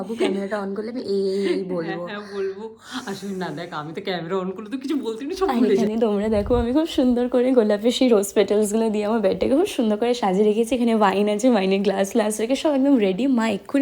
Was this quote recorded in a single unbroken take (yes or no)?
yes